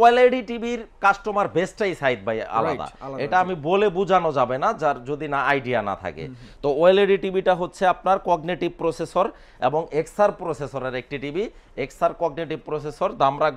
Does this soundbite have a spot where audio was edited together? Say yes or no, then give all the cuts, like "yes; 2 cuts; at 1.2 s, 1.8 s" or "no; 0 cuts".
no; 0 cuts